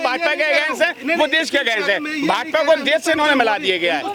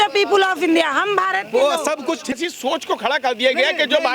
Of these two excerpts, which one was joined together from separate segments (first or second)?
second